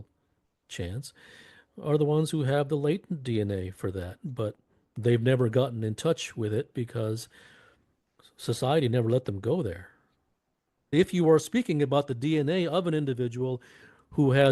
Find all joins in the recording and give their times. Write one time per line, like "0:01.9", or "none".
0:10.9